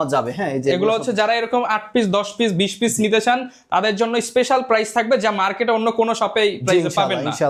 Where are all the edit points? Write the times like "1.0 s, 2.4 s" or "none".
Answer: none